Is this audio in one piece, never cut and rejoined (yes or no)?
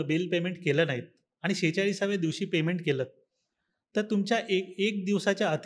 yes